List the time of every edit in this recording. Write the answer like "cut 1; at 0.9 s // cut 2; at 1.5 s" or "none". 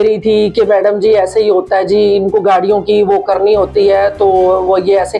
none